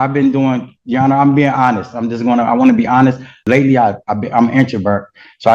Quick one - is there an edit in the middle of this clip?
yes; 1 cut; at 3.4 s

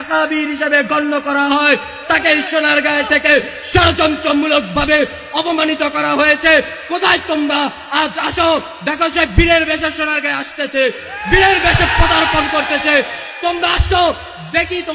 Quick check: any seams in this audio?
no; 0 cuts

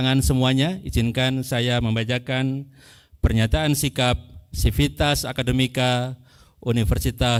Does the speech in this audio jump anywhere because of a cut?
no; 0 cuts

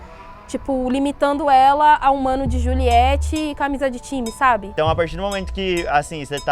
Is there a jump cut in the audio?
yes; 1 cut; at 4.7 s

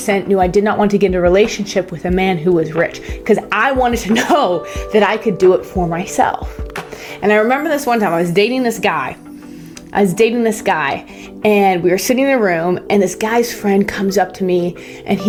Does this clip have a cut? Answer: no; 0 cuts

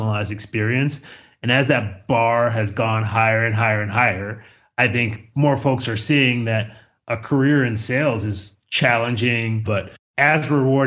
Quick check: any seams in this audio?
yes; 1 cut; at 9.9 s

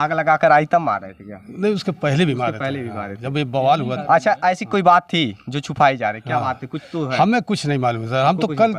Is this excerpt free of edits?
yes; 0 cuts

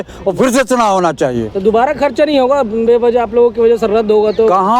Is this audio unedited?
yes; 0 cuts

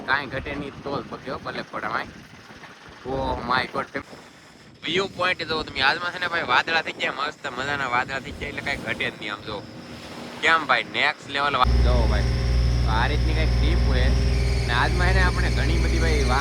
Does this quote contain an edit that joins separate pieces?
yes; 2 cuts; at 4.0 s, 11.6 s

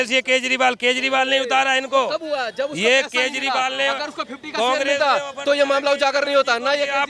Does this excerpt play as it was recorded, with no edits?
yes; 0 cuts

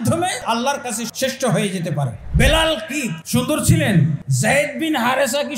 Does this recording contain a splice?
yes; 4 cuts; at 0.9 s, 2.2 s, 3.2 s, 4.2 s

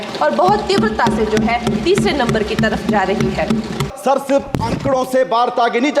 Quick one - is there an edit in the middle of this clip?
yes; 1 cut; at 3.9 s

